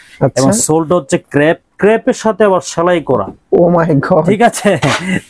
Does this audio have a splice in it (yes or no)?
no